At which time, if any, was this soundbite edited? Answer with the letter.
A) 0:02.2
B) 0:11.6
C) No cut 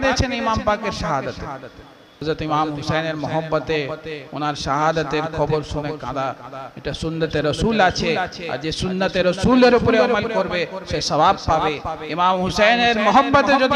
A